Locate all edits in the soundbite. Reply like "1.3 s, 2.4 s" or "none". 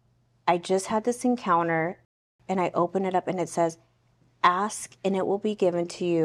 2.1 s